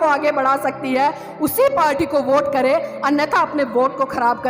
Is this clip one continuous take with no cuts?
yes; 0 cuts

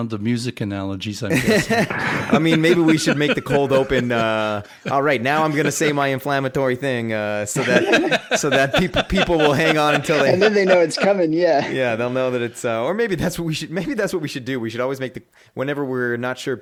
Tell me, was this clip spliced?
no; 0 cuts

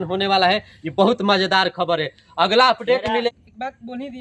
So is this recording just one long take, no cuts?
no; 1 cut; at 3.3 s

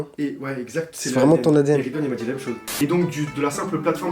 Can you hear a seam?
yes; 1 cut; at 2.7 s

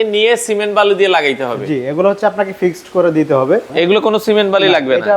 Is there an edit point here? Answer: yes; 1 cut; at 3.7 s

